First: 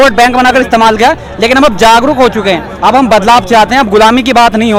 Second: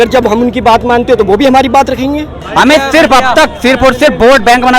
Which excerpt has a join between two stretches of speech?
second; 1 cut; at 2.4 s

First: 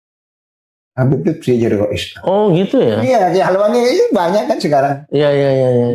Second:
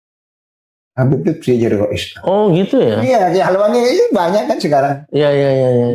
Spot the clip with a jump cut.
first; 2 cuts; at 2.3 s, 5.0 s

